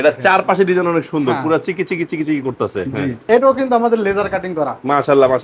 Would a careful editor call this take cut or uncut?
cut